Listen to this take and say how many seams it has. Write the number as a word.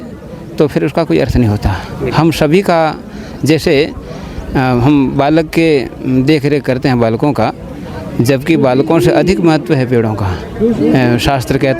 zero